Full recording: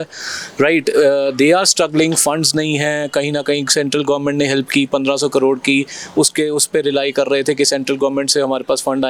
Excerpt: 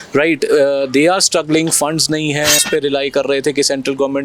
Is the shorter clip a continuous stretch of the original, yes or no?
no